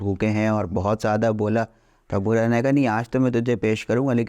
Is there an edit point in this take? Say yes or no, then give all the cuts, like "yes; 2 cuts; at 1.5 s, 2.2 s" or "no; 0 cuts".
no; 0 cuts